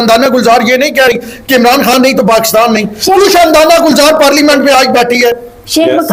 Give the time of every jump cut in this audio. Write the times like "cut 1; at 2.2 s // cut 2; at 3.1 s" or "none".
none